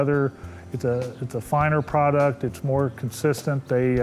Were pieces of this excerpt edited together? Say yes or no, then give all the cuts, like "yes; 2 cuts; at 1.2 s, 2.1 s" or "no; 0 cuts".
no; 0 cuts